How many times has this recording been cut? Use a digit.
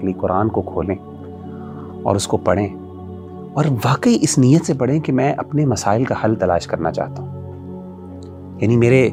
0